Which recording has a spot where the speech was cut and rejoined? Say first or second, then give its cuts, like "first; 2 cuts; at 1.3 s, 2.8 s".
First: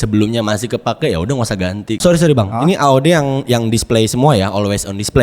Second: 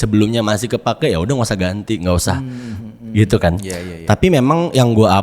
first; 1 cut; at 1.9 s